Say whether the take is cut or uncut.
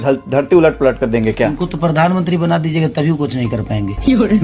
uncut